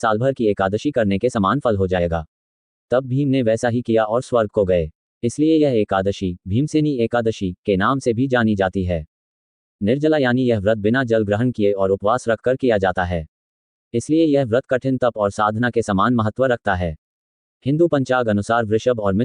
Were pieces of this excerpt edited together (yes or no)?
yes